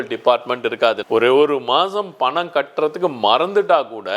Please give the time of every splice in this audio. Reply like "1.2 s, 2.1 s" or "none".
1.0 s